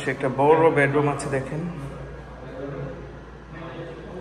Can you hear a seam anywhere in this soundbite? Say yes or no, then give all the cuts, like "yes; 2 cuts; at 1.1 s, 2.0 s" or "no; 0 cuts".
no; 0 cuts